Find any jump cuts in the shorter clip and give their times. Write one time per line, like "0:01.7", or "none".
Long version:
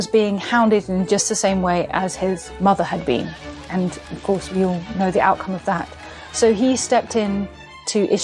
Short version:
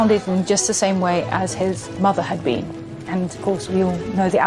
0:03.4